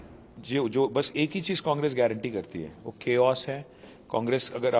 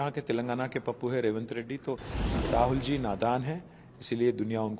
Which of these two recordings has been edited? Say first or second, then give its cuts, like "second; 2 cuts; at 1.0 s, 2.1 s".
second; 1 cut; at 2.1 s